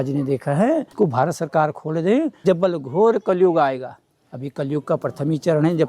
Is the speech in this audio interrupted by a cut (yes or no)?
yes